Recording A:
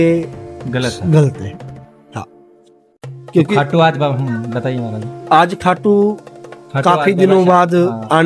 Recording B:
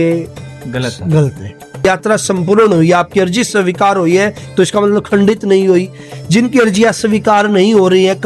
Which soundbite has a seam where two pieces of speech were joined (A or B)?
B